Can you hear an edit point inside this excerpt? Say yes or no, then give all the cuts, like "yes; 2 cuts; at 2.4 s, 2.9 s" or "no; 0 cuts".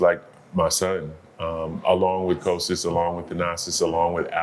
no; 0 cuts